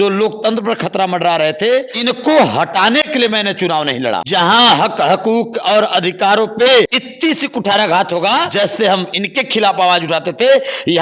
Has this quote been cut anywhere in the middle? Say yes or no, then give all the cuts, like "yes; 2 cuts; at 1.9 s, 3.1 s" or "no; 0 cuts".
yes; 4 cuts; at 1.9 s, 4.3 s, 7.0 s, 8.5 s